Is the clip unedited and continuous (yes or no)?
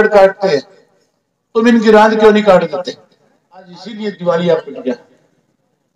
no